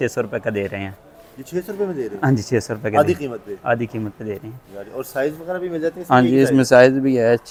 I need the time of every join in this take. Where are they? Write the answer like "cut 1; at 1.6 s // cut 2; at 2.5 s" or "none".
none